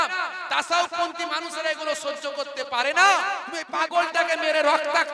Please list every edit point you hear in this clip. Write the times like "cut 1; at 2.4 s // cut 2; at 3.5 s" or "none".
cut 1; at 3.6 s